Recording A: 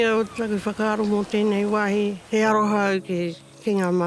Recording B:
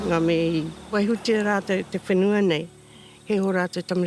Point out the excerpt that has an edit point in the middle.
B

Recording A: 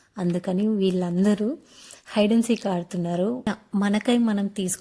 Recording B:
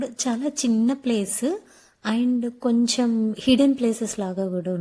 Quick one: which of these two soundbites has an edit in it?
A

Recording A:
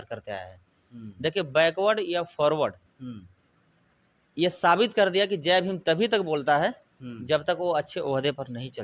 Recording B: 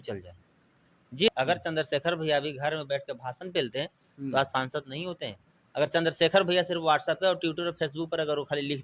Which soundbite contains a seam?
B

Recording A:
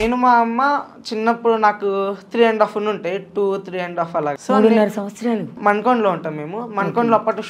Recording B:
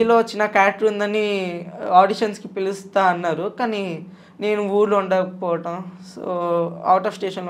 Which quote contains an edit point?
A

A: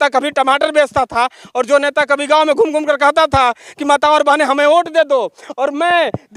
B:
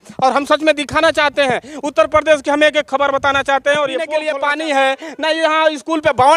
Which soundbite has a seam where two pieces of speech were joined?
B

